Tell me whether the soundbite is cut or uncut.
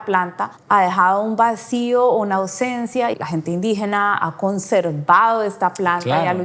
cut